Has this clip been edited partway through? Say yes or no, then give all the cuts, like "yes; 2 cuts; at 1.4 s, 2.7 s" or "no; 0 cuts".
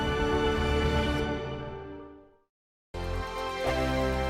no; 0 cuts